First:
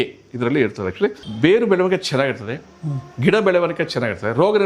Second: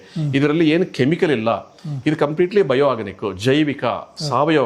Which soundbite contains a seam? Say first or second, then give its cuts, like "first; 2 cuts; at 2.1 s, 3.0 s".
first; 1 cut; at 1.2 s